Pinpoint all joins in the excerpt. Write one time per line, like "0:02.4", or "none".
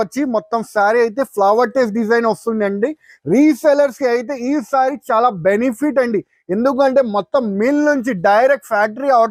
none